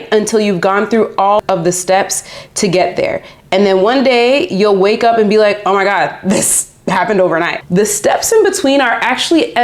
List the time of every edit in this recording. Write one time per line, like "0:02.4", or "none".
0:01.4
0:07.6